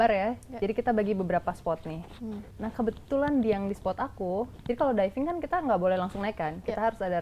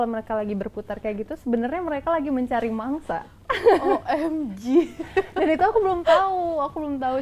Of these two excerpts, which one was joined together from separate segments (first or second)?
first